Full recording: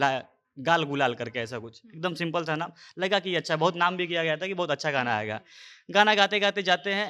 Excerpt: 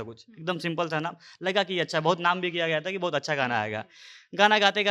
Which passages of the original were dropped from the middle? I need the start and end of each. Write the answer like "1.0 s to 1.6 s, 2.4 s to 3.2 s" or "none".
none